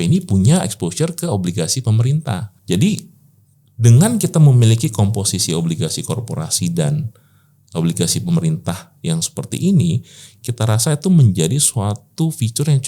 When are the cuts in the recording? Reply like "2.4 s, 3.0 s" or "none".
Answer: 2.5 s